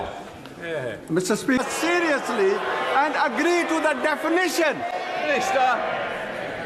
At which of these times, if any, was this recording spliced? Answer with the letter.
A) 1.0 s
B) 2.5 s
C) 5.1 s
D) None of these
D